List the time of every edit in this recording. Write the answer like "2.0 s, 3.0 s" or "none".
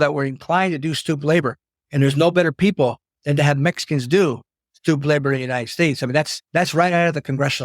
6.4 s